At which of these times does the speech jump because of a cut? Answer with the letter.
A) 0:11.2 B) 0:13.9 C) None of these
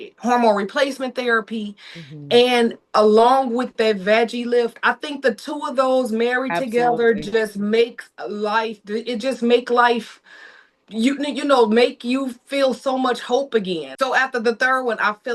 B